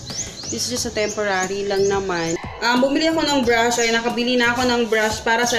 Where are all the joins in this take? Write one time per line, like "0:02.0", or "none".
0:02.4